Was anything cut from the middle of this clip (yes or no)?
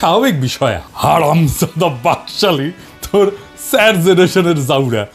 no